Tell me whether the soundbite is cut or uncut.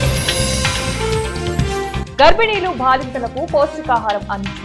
cut